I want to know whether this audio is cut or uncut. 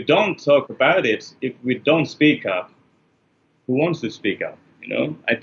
uncut